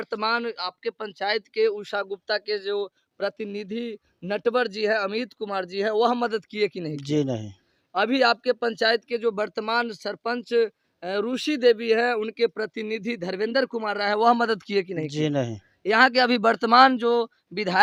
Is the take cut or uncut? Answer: uncut